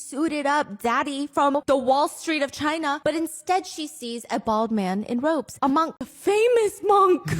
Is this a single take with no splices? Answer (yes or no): no